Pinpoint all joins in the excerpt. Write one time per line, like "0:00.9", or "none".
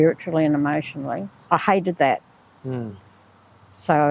0:01.4